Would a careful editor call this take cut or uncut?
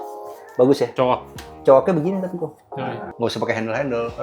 cut